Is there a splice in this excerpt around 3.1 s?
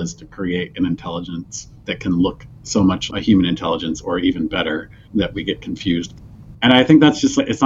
no; 2 cuts; at 5.0 s, 6.1 s

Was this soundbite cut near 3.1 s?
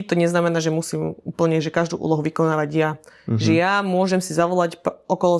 no; 0 cuts

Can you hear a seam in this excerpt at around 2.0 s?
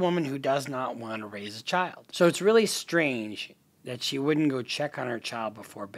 yes; 1 cut; at 2.0 s

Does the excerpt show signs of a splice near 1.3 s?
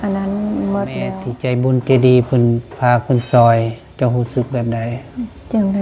yes; 1 cut; at 1.3 s

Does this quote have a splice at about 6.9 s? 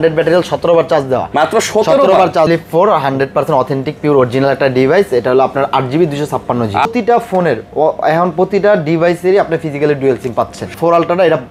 yes; 3 cuts; at 2.5 s, 6.9 s, 10.7 s

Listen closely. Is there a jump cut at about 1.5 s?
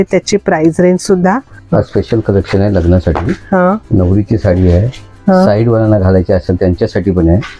yes; 1 cut; at 1.5 s

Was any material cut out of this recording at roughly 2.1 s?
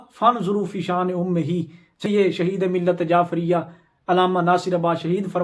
yes; 1 cut; at 2.1 s

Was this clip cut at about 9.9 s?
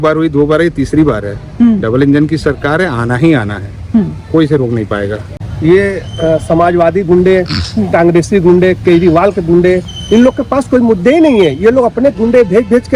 no; 1 cut; at 5.4 s

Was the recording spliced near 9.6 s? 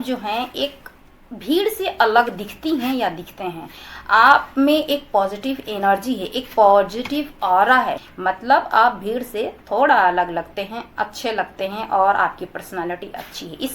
no; 1 cut; at 8.1 s

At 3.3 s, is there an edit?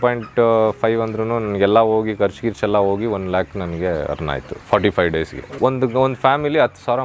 no; 1 cut; at 5.6 s

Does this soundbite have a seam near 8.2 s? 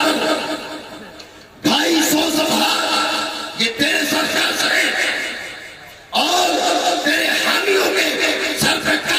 no; 0 cuts

